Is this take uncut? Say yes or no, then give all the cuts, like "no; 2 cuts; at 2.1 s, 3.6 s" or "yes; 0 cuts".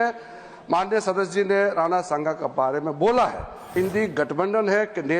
no; 1 cut; at 3.7 s